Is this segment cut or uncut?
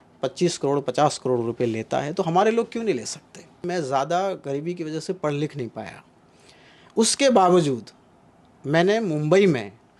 cut